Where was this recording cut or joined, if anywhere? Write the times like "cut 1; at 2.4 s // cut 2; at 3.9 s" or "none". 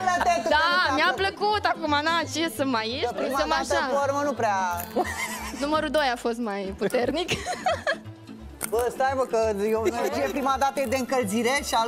cut 1; at 3.0 s // cut 2; at 10.2 s